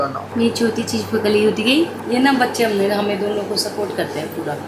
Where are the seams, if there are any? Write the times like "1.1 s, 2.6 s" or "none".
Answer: none